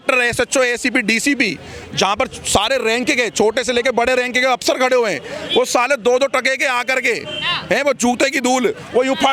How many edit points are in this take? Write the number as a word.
zero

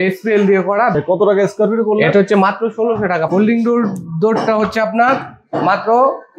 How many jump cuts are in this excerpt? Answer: two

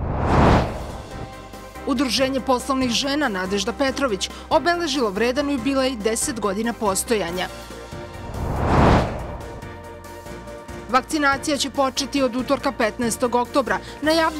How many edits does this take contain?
one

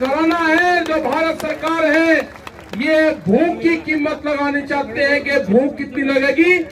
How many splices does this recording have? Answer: zero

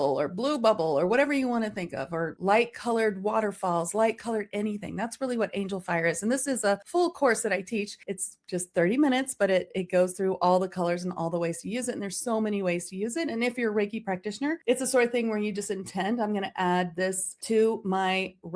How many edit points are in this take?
zero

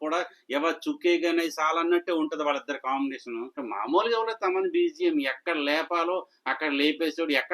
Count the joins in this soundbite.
one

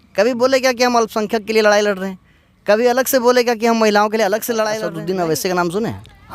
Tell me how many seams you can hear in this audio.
one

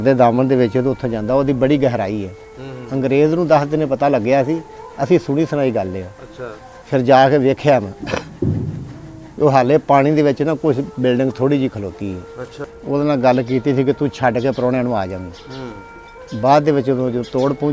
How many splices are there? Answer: one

